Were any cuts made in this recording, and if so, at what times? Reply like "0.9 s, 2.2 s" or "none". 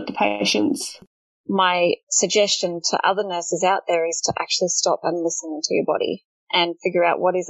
1.0 s, 2.1 s